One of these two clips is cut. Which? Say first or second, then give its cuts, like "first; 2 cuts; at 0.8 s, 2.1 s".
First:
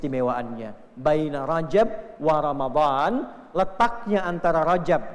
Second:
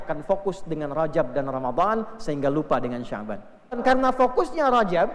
second; 1 cut; at 3.8 s